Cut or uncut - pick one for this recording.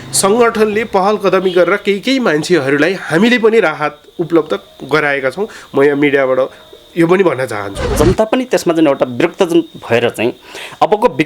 cut